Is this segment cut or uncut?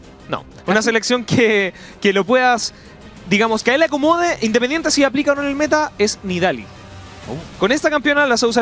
uncut